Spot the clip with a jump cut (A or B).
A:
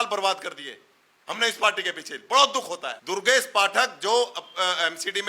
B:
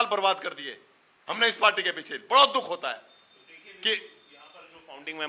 A